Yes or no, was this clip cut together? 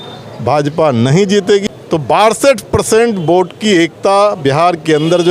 yes